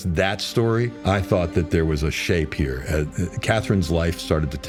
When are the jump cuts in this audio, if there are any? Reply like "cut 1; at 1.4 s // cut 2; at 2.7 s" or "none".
none